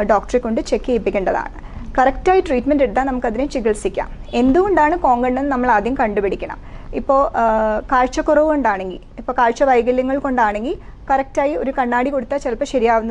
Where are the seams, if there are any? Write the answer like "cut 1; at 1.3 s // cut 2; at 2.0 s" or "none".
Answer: none